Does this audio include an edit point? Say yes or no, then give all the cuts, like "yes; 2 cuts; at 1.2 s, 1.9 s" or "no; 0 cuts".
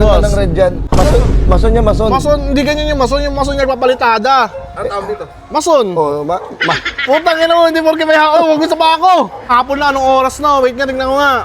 yes; 2 cuts; at 0.9 s, 9.5 s